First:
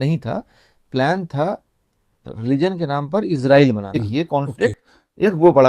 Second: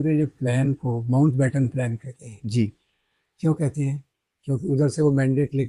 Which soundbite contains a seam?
first; 1 cut; at 3.9 s

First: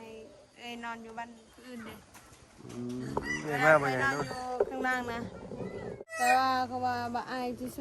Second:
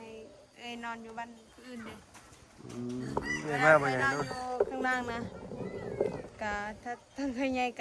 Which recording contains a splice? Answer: first; 1 cut; at 6.1 s

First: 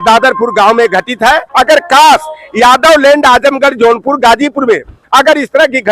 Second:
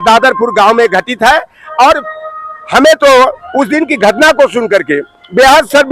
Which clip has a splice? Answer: first; 1 cut; at 1.5 s

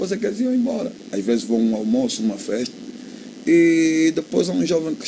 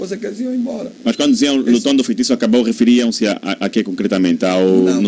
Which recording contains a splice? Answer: first; 1 cut; at 0.9 s

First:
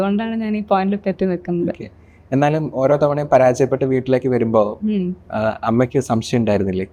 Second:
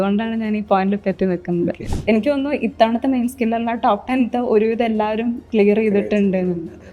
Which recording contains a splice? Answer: second; 1 cut; at 1.9 s

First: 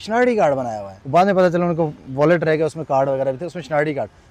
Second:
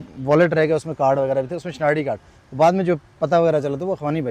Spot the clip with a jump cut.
first; 1 cut; at 0.9 s

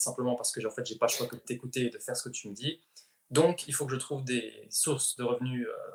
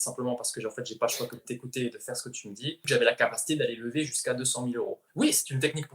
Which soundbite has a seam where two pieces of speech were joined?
second; 2 cuts; at 2.8 s, 5.0 s

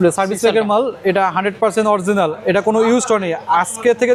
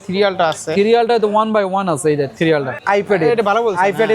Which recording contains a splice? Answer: second; 1 cut; at 2.8 s

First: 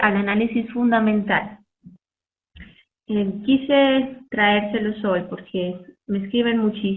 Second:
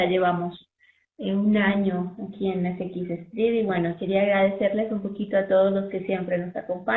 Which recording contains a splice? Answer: first; 1 cut; at 5.9 s

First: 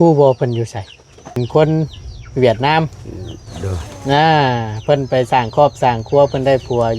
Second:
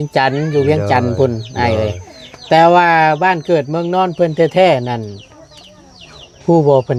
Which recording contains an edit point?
first; 1 cut; at 1.4 s

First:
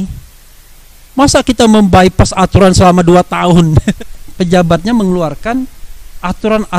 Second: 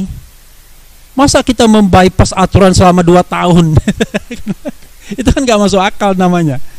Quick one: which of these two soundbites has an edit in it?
first; 1 cut; at 4.0 s

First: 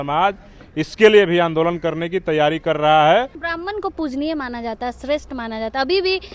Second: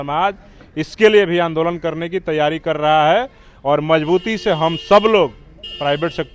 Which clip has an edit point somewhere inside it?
first; 1 cut; at 3.4 s

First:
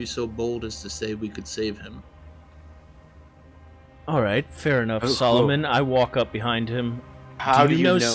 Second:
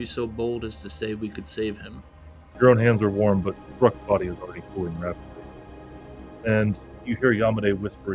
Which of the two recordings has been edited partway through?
second; 1 cut; at 2.5 s

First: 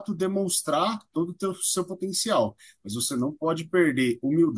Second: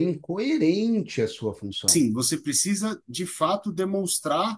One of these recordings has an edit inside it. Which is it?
second; 1 cut; at 1.9 s

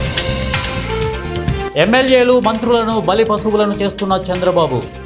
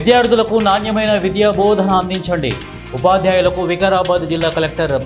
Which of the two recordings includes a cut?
first; 1 cut; at 1.7 s

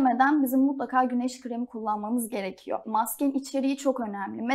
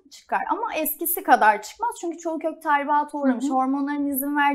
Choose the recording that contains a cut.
first; 1 cut; at 2.8 s

